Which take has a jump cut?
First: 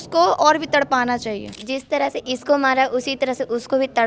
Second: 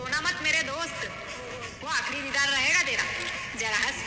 first; 1 cut; at 1.5 s

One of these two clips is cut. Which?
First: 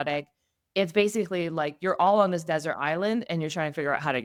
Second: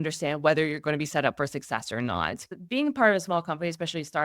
second; 1 cut; at 2.5 s

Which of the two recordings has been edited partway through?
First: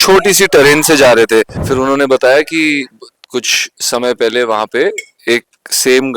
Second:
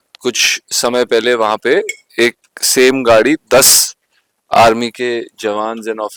first; 1 cut; at 1.6 s

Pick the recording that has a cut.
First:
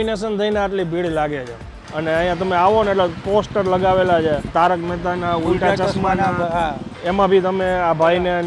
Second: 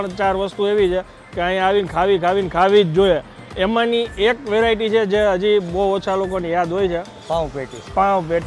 first; 3 cuts; at 1.9 s, 4.5 s, 6.9 s

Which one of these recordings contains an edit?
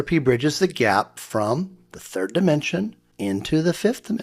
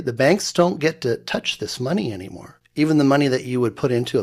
first; 1 cut; at 3.0 s

